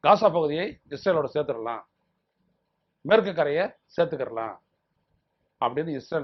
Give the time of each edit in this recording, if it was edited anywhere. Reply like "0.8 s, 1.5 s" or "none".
none